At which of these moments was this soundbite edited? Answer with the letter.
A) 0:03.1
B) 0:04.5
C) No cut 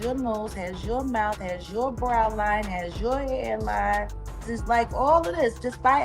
B